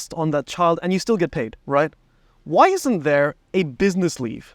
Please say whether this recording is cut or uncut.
cut